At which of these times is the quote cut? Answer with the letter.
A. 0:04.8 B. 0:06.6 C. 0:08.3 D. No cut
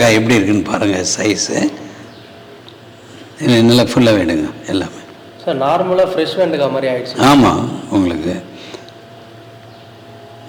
D